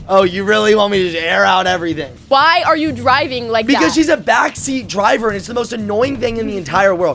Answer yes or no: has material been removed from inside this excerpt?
yes